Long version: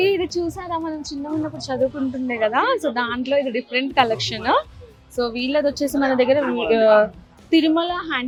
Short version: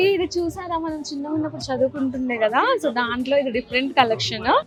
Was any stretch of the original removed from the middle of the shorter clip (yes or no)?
no